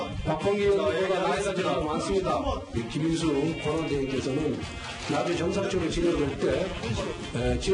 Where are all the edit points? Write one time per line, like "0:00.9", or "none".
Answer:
0:01.8